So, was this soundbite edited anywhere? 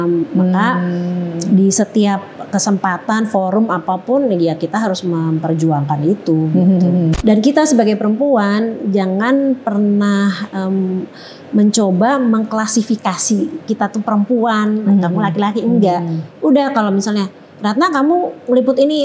yes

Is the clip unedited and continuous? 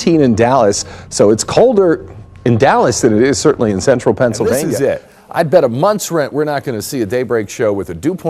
no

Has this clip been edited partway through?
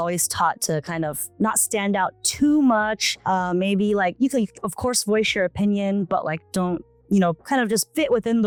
no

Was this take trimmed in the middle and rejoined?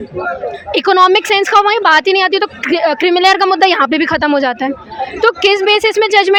no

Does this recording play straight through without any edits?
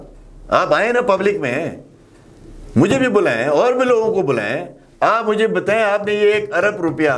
yes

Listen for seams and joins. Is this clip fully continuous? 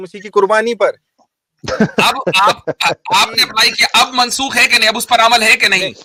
yes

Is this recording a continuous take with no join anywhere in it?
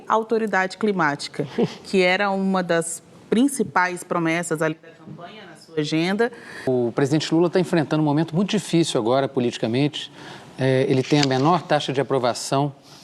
no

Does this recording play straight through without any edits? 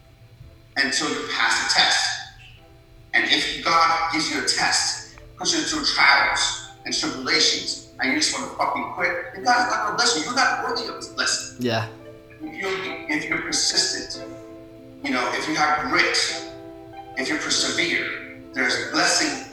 yes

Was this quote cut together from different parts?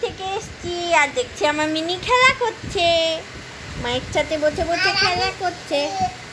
no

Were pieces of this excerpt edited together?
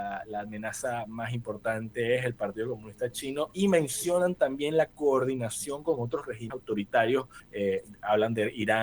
yes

